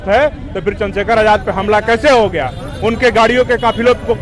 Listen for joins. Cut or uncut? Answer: uncut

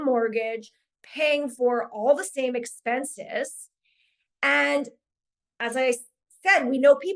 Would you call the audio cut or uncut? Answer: uncut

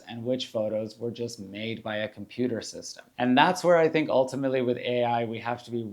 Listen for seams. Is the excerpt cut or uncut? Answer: cut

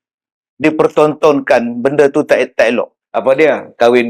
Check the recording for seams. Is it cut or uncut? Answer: cut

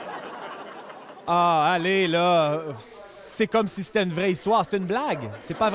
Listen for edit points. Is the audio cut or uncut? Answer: cut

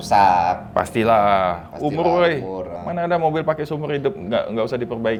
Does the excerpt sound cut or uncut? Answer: uncut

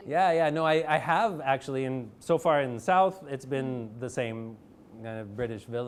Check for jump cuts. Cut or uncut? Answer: uncut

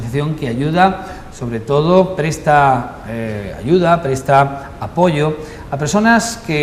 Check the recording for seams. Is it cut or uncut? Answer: cut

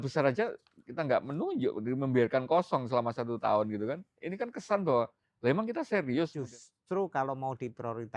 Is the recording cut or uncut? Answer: cut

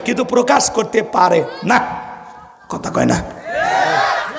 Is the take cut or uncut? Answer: uncut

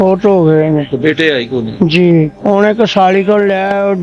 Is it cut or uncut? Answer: cut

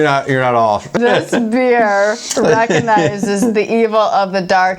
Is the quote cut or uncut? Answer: cut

